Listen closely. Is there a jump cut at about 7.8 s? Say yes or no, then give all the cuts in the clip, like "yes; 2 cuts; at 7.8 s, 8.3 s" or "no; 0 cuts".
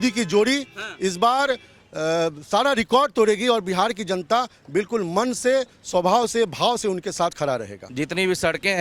yes; 1 cut; at 7.8 s